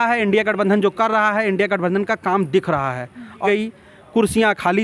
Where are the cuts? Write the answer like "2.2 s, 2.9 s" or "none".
3.4 s